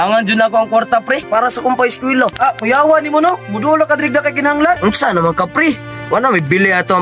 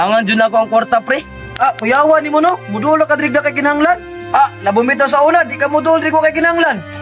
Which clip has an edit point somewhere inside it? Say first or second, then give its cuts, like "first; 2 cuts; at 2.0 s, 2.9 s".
first; 3 cuts; at 1.2 s, 2.3 s, 4.8 s